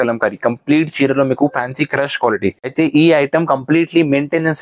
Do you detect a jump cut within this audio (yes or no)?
yes